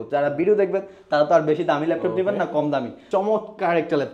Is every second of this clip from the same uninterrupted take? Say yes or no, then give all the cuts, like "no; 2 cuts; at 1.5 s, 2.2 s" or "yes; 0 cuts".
no; 1 cut; at 3.0 s